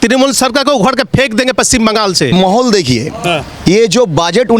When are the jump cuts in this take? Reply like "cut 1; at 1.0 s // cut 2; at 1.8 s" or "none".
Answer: cut 1; at 2.3 s